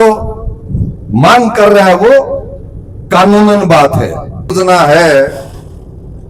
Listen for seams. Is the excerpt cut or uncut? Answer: cut